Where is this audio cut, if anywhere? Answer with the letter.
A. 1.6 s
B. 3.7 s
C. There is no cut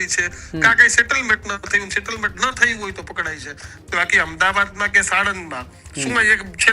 C